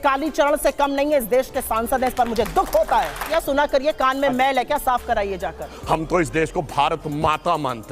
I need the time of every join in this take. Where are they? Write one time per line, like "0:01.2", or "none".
0:03.2
0:05.7